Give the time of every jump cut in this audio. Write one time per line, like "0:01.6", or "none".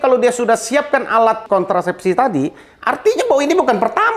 0:01.4